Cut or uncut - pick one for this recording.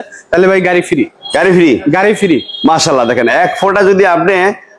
uncut